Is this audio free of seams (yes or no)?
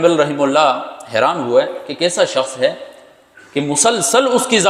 yes